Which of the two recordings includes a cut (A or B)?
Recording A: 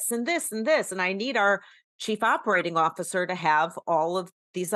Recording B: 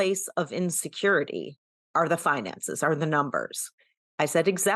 B